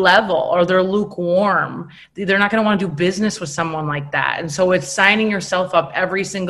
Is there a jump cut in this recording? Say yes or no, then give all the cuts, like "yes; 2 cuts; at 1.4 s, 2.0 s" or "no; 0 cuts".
no; 0 cuts